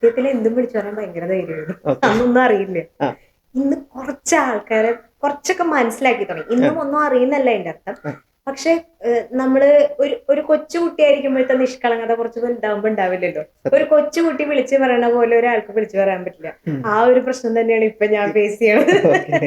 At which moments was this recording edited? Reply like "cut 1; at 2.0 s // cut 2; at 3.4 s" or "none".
none